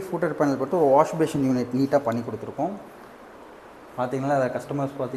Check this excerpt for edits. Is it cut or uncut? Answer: uncut